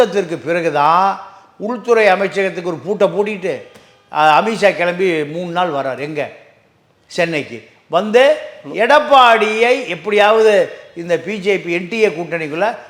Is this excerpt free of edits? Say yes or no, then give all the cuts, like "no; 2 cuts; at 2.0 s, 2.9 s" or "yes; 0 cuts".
yes; 0 cuts